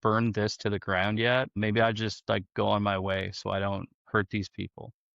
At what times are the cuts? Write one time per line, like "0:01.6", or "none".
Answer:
0:01.5